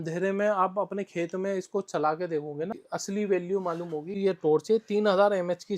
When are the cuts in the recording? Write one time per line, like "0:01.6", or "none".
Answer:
0:02.8
0:04.2